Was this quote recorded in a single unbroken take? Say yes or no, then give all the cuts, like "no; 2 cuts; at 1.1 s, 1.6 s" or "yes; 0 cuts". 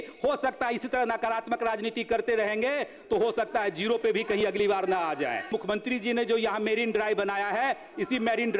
no; 1 cut; at 5.5 s